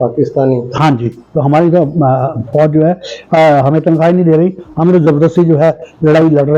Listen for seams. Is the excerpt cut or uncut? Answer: uncut